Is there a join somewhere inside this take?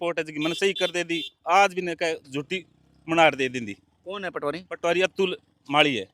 no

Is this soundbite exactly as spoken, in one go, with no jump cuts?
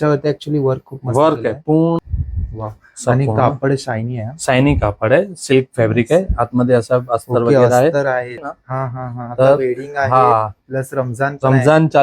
no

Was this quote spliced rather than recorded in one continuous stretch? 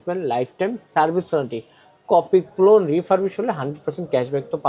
no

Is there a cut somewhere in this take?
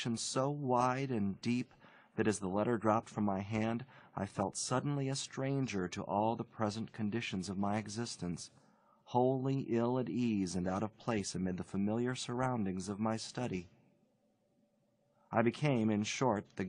yes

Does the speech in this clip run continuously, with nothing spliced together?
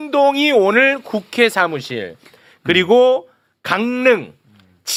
yes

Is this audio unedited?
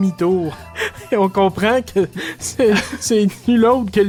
yes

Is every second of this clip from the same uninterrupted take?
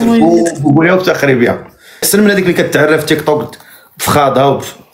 no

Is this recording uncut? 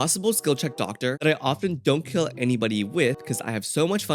no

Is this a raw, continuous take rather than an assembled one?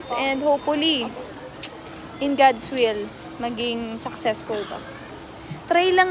no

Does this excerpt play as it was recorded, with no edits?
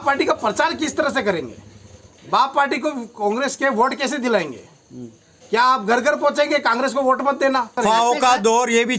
no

